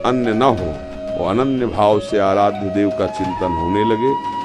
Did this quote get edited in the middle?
no; 0 cuts

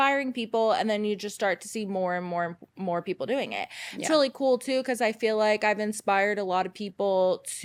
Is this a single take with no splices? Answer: yes; 0 cuts

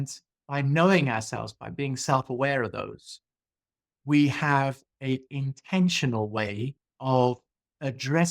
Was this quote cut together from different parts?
yes; 2 cuts; at 5.3 s, 6.8 s

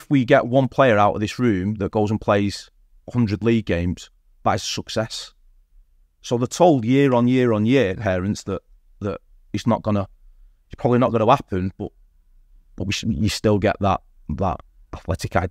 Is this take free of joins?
yes; 0 cuts

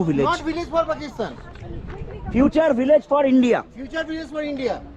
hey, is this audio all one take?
yes; 0 cuts

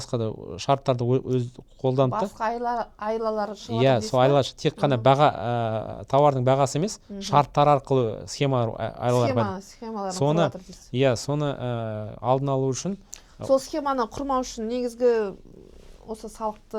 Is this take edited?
no; 0 cuts

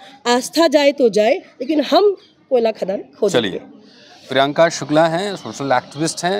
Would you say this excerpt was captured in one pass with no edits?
yes; 0 cuts

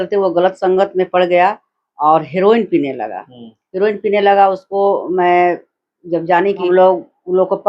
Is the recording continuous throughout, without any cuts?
no; 1 cut; at 6.6 s

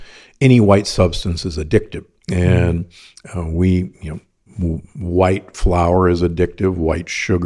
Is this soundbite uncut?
yes; 0 cuts

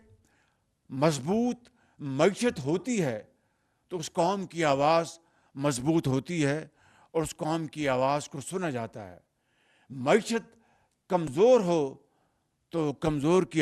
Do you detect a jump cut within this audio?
no; 0 cuts

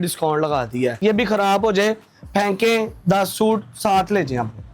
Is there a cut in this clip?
yes; 1 cut; at 1.0 s

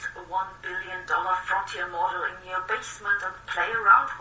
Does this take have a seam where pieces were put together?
no; 0 cuts

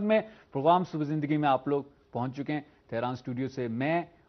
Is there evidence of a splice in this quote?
yes; 1 cut; at 1.9 s

